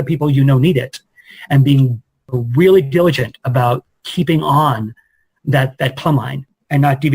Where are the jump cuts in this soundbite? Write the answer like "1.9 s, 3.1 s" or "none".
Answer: 2.2 s